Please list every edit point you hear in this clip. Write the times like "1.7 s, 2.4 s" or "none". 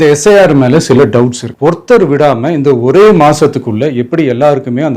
1.4 s

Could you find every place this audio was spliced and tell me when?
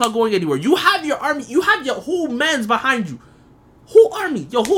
none

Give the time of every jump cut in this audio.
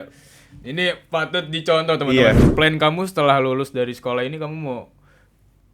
2.4 s

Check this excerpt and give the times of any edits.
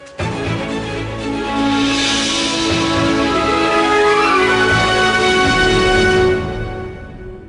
none

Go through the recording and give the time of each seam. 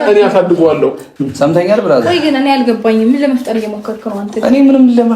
1.1 s

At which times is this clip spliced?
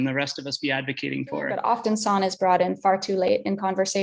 1.5 s

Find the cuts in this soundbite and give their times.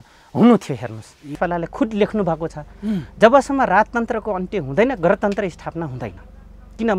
1.2 s

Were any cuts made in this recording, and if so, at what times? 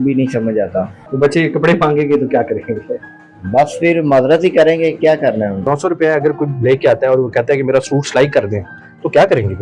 1.0 s, 5.7 s

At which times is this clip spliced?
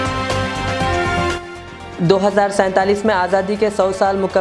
1.1 s

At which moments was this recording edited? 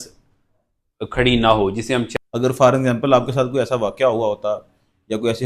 2.1 s

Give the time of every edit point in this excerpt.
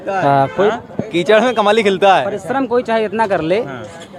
none

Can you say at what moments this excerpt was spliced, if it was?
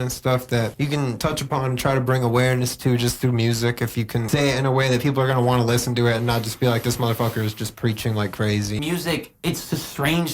1.2 s, 4.3 s, 8.8 s

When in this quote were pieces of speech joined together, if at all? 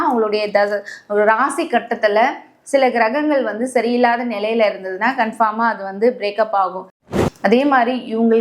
7.0 s

